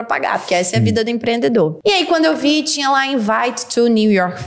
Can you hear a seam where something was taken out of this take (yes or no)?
yes